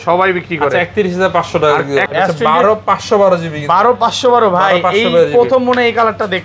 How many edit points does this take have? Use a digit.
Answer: 1